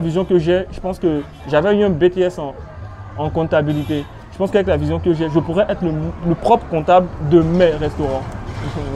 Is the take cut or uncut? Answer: uncut